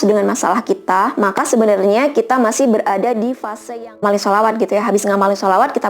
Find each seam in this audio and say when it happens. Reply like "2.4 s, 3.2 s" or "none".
4.0 s

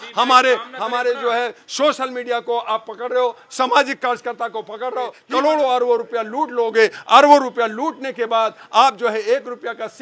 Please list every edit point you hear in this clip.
5.2 s

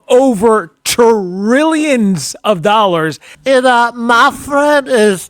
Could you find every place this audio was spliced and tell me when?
3.3 s

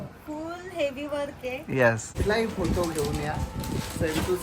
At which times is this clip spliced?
2.2 s

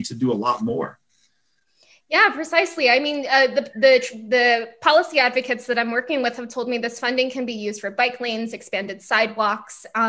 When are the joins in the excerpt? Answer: none

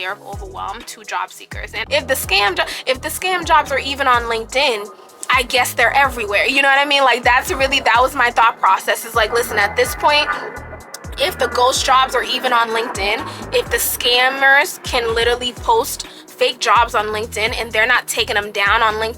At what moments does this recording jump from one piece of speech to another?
1.7 s

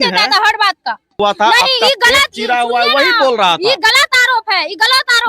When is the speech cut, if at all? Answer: 1.2 s

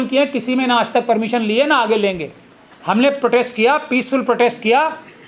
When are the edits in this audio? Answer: none

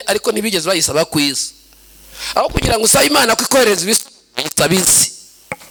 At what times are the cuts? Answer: none

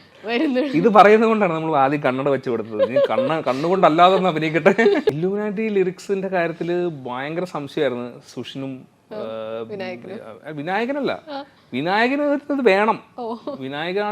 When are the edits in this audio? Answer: 5.1 s

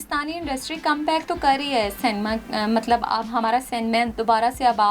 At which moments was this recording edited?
none

